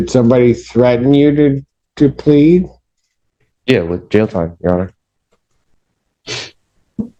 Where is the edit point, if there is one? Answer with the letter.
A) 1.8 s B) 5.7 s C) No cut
C